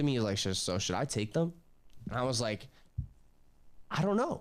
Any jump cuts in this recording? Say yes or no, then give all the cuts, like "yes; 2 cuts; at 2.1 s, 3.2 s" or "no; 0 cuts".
no; 0 cuts